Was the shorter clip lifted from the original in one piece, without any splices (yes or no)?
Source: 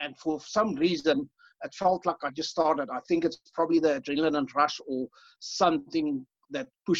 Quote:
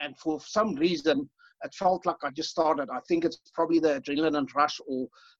yes